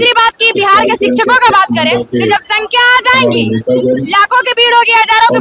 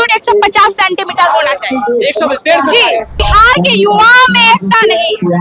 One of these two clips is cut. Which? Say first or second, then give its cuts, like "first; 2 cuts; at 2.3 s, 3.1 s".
second; 1 cut; at 3.2 s